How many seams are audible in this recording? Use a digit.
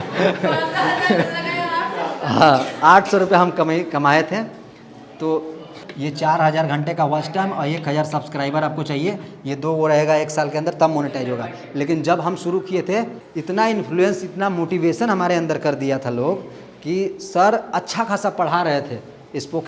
2